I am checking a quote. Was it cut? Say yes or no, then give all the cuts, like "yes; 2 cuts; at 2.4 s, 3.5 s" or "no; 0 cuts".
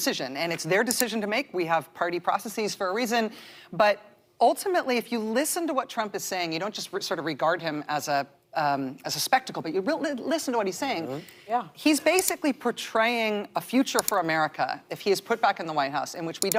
no; 0 cuts